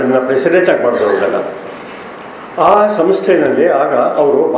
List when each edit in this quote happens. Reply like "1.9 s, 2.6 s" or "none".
none